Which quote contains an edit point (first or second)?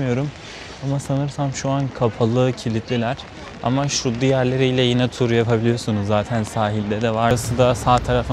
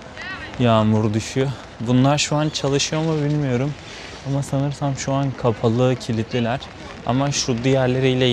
first